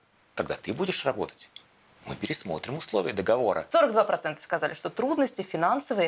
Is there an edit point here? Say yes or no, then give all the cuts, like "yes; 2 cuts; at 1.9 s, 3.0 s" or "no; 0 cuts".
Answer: yes; 1 cut; at 3.6 s